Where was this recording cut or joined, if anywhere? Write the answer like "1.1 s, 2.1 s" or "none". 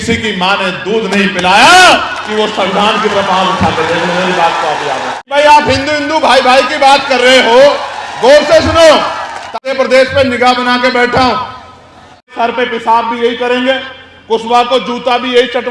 5.2 s, 9.5 s, 12.3 s